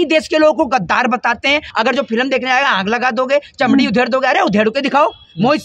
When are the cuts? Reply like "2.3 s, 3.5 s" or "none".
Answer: 1.7 s